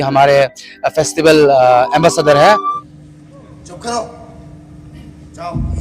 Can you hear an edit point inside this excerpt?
yes; 1 cut; at 2.8 s

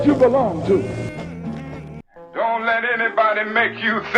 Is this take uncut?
no; 1 cut; at 2.0 s

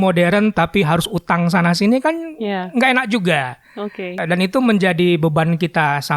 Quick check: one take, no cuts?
no; 1 cut; at 4.2 s

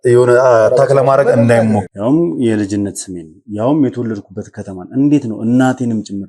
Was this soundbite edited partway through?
yes; 1 cut; at 1.9 s

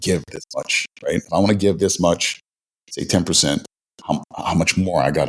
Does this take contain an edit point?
no; 0 cuts

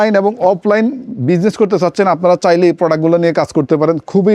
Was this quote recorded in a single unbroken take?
yes; 0 cuts

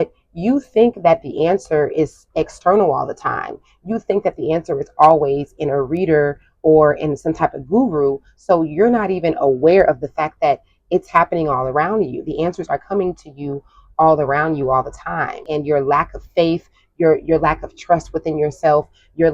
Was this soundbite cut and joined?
yes; 1 cut; at 15.4 s

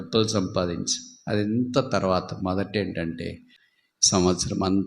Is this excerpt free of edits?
no; 1 cut; at 3.4 s

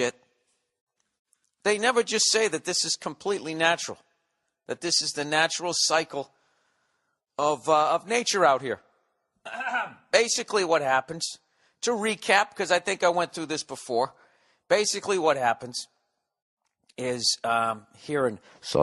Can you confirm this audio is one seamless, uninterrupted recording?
no; 1 cut; at 9.3 s

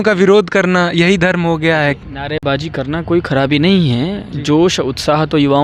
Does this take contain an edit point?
no; 0 cuts

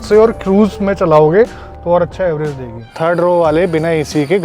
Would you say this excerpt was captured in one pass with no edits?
no; 1 cut; at 3.0 s

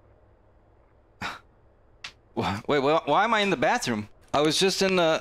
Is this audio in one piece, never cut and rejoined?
no; 1 cut; at 4.1 s

